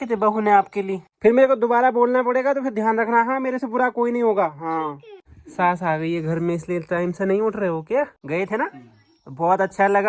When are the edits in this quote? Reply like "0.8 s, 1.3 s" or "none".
1.1 s, 5.2 s, 8.2 s